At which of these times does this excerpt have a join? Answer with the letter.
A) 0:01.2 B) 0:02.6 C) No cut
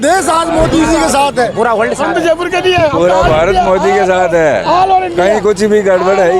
C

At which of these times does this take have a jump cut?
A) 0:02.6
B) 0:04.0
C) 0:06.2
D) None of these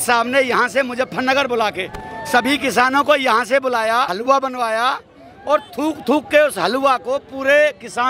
D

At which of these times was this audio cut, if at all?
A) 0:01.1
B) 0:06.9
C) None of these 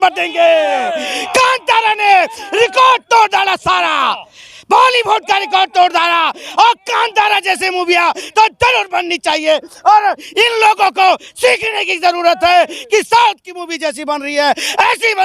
C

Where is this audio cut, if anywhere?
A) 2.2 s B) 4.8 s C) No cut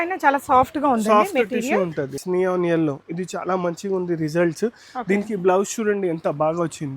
A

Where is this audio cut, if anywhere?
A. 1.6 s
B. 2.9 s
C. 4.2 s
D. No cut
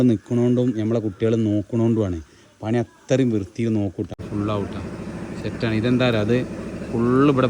C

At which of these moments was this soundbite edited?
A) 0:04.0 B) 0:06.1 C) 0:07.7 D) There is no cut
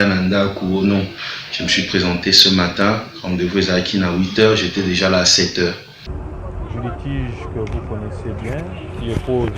B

